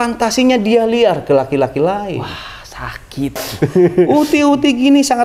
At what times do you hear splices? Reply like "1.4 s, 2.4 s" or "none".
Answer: 3.4 s